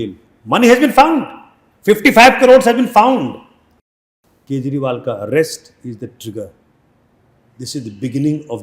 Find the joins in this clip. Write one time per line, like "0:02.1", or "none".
0:03.9